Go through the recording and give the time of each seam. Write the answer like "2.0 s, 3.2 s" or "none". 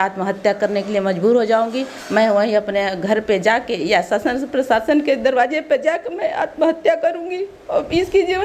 none